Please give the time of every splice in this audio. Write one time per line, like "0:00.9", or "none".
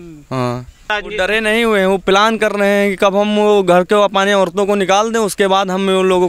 0:01.0